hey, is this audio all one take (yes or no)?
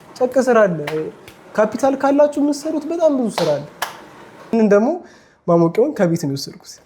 no